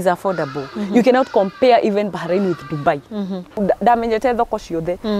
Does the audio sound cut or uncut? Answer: cut